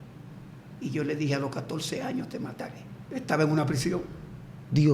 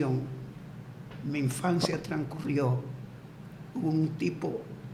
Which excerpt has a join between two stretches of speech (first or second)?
first